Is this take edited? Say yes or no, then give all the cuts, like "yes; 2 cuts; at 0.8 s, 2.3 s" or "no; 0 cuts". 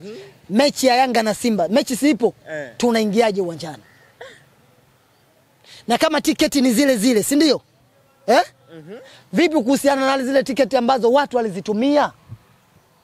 no; 0 cuts